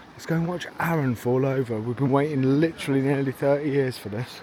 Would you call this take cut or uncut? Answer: uncut